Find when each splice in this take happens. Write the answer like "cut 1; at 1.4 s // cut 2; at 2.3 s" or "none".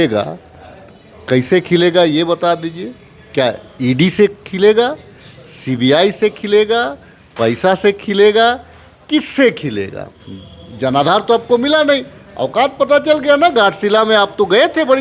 none